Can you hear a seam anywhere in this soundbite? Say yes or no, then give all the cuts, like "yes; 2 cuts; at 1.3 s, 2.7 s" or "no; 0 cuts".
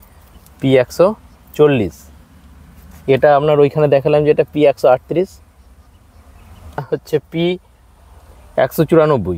yes; 1 cut; at 6.8 s